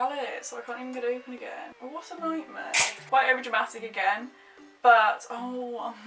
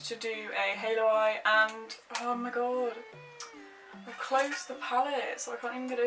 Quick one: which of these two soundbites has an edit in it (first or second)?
first